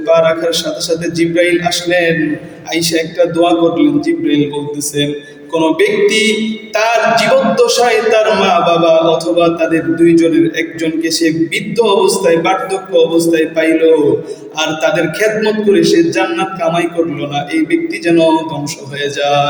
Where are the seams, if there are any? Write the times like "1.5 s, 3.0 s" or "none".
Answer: none

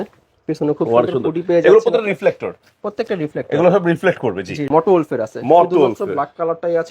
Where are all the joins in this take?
4.7 s

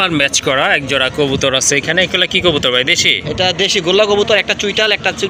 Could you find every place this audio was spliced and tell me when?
none

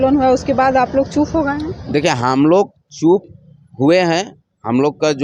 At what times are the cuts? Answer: none

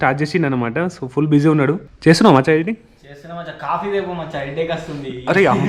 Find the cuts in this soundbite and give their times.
1.9 s

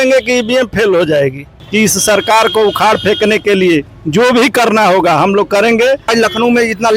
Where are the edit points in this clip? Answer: 1.6 s, 4.0 s, 6.1 s

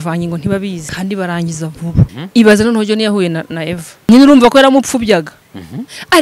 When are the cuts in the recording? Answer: 0.9 s, 2.1 s, 4.1 s

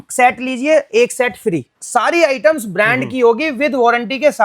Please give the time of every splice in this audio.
1.8 s

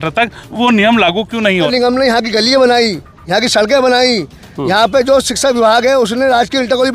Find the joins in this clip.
1.7 s

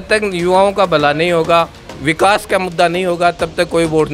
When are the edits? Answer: none

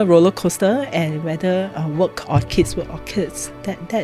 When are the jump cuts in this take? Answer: none

